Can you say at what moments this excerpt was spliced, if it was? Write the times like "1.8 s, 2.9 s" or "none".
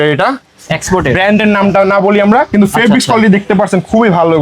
none